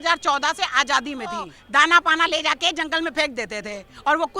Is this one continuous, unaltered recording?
no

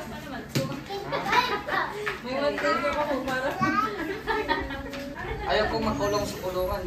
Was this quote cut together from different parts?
yes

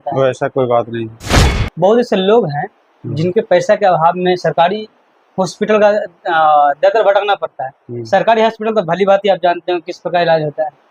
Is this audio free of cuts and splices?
no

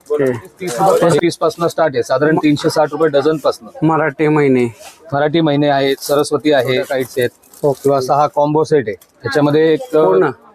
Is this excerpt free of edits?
no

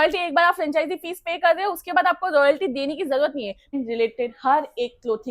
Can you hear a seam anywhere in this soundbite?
yes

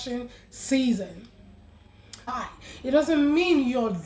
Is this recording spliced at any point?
yes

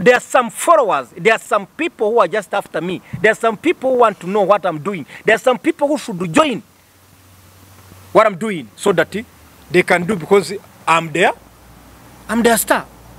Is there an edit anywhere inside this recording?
no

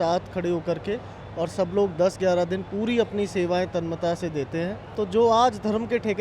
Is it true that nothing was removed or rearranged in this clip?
no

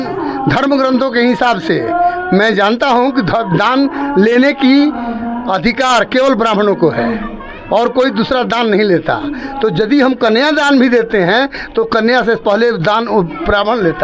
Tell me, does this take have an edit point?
no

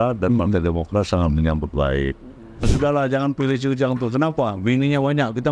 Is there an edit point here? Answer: yes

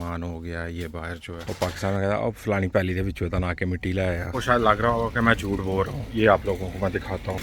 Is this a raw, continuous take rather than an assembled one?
no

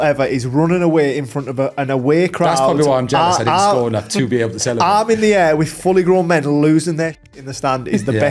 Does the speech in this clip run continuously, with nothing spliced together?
yes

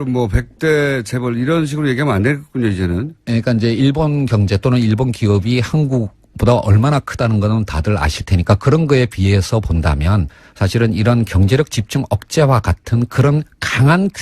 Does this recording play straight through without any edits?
no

